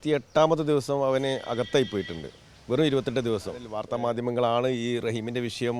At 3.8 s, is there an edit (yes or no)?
yes